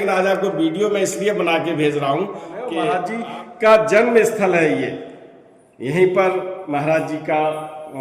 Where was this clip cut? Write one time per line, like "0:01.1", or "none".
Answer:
0:02.8